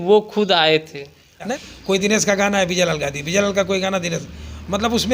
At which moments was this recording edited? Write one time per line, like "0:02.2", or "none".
0:01.5